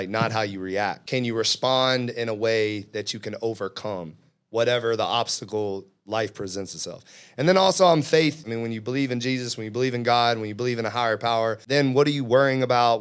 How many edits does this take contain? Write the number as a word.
three